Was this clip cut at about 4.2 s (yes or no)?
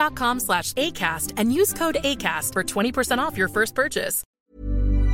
yes